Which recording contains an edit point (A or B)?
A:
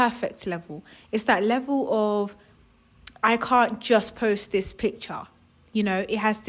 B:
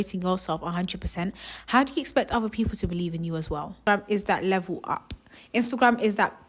B